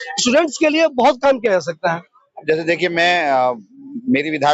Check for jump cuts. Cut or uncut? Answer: uncut